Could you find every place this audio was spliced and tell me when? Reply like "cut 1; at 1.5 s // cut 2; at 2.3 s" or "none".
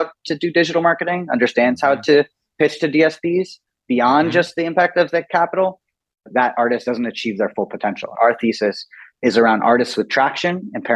cut 1; at 6.3 s // cut 2; at 8.1 s